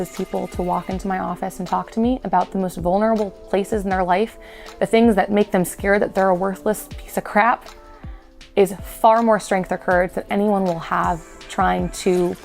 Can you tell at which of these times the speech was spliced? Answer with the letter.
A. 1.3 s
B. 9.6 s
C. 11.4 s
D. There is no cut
C